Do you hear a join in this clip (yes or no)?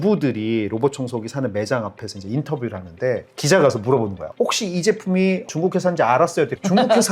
yes